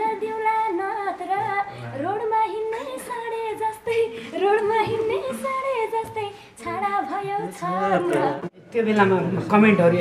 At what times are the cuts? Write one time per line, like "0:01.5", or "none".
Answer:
0:08.3

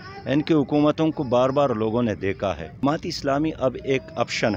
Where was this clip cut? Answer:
0:02.8

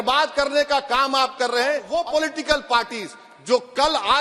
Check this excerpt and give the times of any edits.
0:01.9

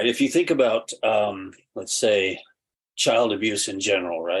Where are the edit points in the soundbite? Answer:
none

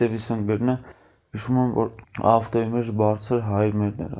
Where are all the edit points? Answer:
0:02.0

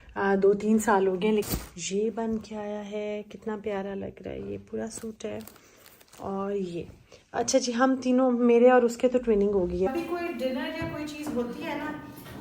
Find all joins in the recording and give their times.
0:01.5
0:09.9

